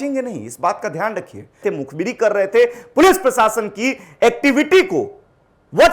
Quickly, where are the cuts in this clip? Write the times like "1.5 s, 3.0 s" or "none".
1.6 s